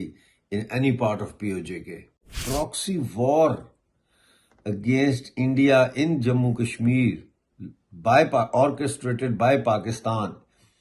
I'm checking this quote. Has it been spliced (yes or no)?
yes